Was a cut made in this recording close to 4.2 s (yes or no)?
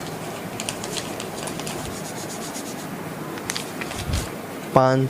yes